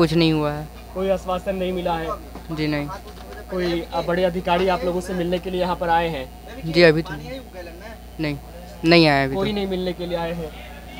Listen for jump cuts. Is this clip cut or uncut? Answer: uncut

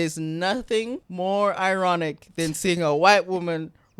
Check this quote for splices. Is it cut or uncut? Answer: cut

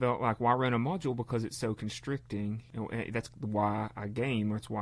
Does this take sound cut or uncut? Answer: cut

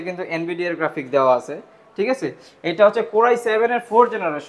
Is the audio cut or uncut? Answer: uncut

